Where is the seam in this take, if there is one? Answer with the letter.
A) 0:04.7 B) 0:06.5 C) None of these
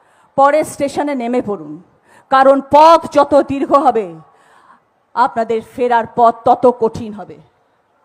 C